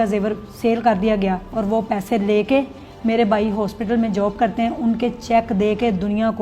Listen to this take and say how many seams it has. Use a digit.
0